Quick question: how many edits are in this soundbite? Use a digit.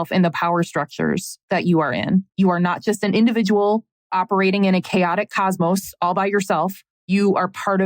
3